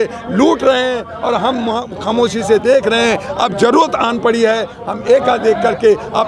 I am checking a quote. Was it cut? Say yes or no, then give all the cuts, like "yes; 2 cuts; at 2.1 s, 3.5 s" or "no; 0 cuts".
no; 0 cuts